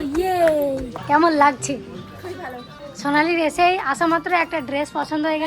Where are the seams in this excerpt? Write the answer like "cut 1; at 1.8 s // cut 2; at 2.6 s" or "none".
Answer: cut 1; at 0.9 s // cut 2; at 2.8 s